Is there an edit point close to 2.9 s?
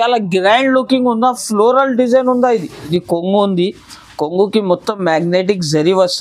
yes; 1 cut; at 2.9 s

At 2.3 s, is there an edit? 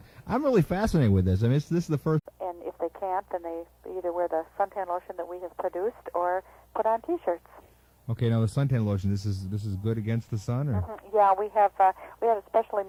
no; 0 cuts

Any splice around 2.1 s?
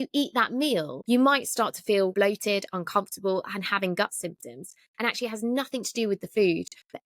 yes; 2 cuts; at 0.9 s, 2.1 s

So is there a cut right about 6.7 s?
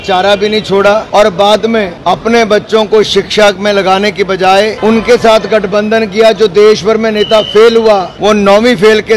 no; 4 cuts; at 1.1 s, 1.9 s, 4.8 s, 8.1 s

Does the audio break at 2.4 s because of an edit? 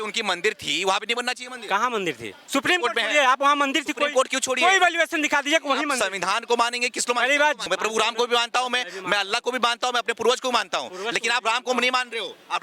yes; 2 cuts; at 2.4 s, 7.7 s

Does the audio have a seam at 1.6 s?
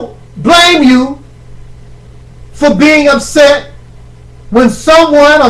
no; 0 cuts

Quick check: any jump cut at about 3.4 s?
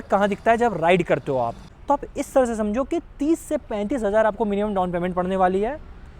no; 1 cut; at 1.6 s

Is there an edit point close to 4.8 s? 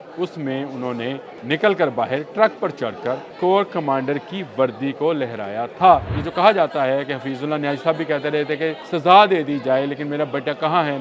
no; 4 cuts; at 1.3 s, 3.3 s, 6.2 s, 8.8 s

